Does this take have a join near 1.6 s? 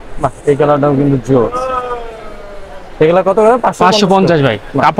no; 0 cuts

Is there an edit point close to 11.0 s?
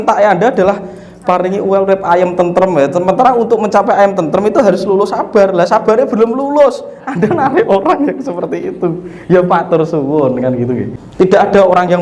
yes; 1 cut; at 11.0 s

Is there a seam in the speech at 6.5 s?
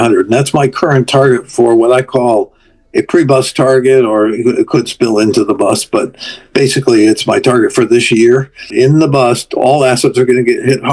no; 1 cut; at 8.7 s

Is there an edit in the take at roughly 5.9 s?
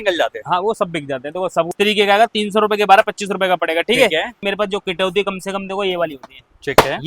no; 2 cuts; at 1.7 s, 4.4 s

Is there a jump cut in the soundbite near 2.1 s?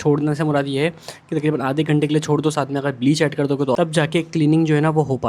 no; 1 cut; at 3.8 s

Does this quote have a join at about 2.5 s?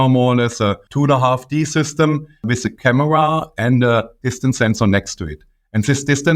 yes; 2 cuts; at 0.8 s, 2.5 s

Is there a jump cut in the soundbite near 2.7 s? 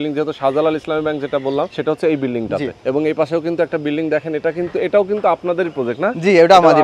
yes; 2 cuts; at 1.7 s, 2.7 s

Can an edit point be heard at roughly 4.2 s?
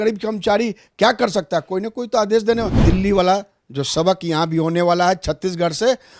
no; 1 cut; at 2.8 s

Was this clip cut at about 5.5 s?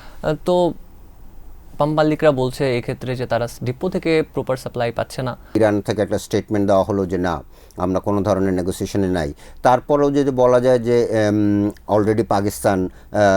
yes; 1 cut; at 5.5 s

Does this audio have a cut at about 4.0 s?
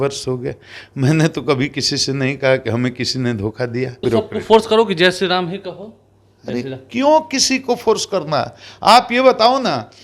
yes; 1 cut; at 4.0 s

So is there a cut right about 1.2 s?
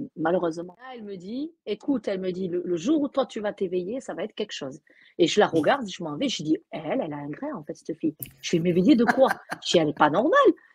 yes; 1 cut; at 1.2 s

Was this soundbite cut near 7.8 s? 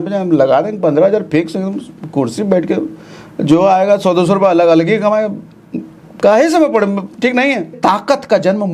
yes; 1 cut; at 7.8 s

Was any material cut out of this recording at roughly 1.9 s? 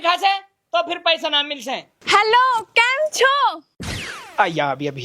yes; 1 cut; at 1.9 s

